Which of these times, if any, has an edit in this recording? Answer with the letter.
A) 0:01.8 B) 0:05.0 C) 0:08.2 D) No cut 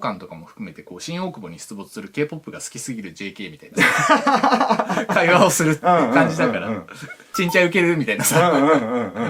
D